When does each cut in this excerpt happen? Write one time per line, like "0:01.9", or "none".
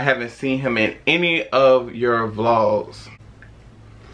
0:03.1